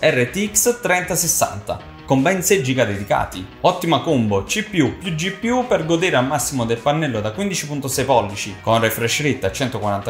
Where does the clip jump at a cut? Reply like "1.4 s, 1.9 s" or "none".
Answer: none